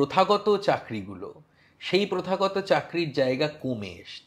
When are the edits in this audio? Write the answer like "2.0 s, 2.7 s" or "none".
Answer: none